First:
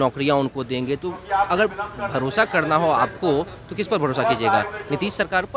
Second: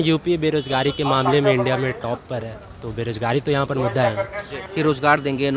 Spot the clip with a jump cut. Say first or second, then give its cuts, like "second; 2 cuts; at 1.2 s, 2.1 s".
second; 1 cut; at 4.6 s